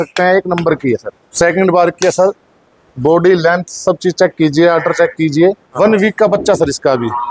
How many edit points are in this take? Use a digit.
2